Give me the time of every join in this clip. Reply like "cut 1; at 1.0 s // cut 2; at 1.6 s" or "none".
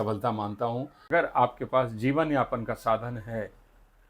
cut 1; at 1.0 s